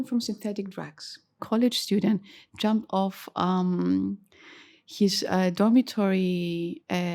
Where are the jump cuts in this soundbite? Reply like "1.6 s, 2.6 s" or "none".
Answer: 1.4 s